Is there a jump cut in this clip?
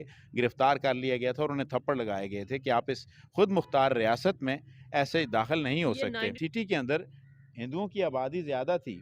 yes; 1 cut; at 6.4 s

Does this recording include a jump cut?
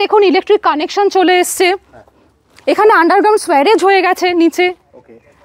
no; 0 cuts

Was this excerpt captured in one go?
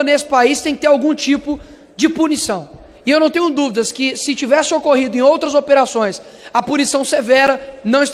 yes; 0 cuts

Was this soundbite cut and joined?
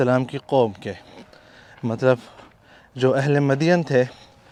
no; 0 cuts

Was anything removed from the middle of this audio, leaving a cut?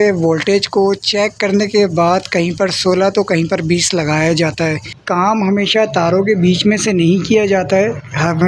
yes; 1 cut; at 5.2 s

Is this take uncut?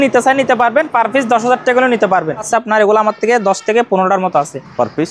no; 1 cut; at 2.5 s

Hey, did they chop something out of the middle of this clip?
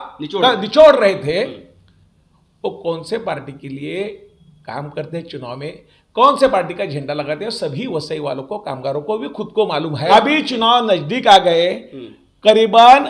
yes; 1 cut; at 10.1 s

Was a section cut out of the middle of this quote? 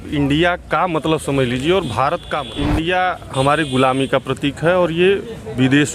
yes; 1 cut; at 2.4 s

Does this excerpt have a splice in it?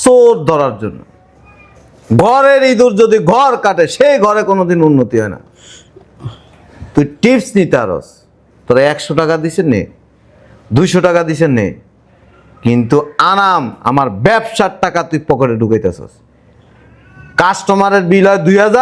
no; 0 cuts

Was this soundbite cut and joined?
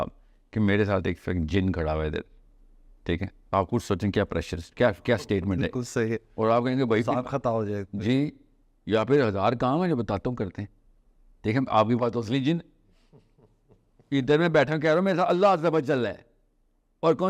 no; 0 cuts

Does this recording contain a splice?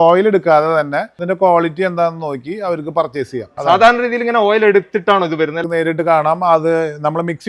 yes; 3 cuts; at 1.1 s, 3.5 s, 5.6 s

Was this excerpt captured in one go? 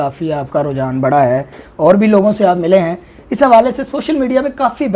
yes; 0 cuts

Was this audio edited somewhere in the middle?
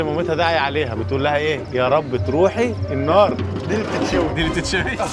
yes; 1 cut; at 3.5 s

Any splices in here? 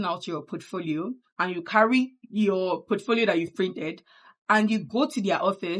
yes; 2 cuts; at 1.3 s, 2.2 s

